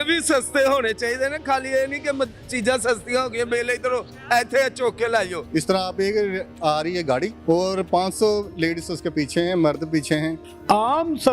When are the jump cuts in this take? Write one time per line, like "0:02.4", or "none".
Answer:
0:05.4
0:10.4